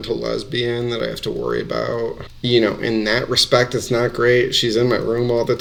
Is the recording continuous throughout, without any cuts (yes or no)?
yes